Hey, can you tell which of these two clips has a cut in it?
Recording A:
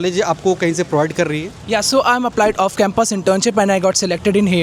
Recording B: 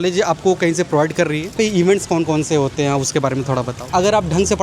B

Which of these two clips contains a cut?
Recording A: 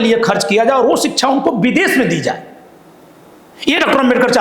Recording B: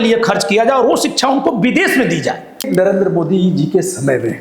B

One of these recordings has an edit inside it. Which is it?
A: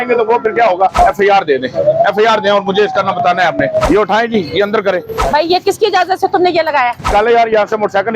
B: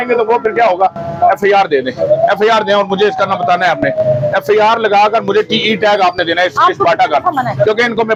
A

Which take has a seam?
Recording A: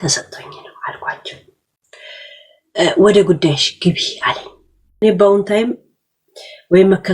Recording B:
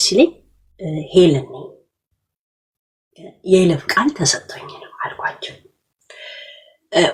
A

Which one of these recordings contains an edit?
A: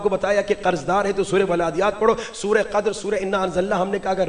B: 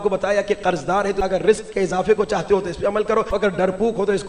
B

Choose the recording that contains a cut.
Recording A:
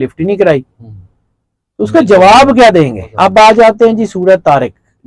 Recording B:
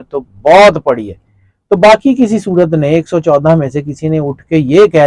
A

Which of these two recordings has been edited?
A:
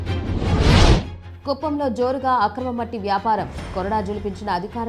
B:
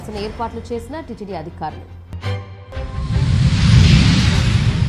A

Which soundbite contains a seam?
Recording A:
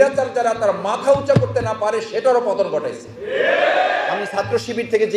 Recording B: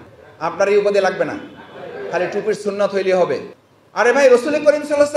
A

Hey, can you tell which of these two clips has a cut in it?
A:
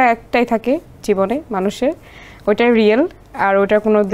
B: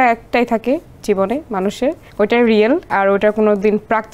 B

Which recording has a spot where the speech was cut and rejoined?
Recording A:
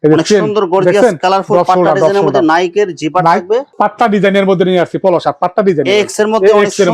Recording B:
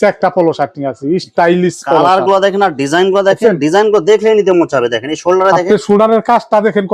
A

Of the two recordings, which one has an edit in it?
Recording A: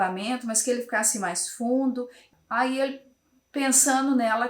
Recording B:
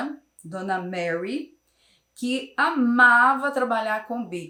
A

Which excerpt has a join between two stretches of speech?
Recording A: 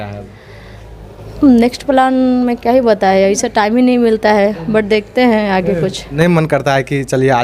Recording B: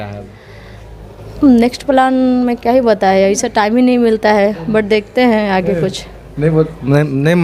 A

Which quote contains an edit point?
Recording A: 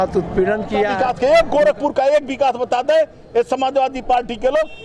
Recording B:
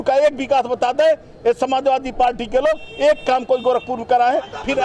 A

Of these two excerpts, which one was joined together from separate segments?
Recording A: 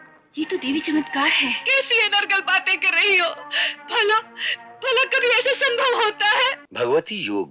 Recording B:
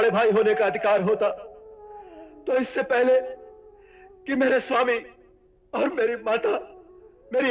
A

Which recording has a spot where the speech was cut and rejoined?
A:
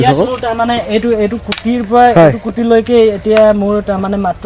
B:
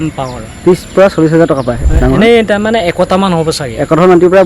B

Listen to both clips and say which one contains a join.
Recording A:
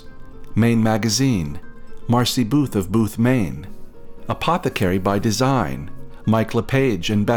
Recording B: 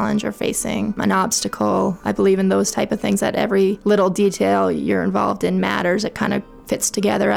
B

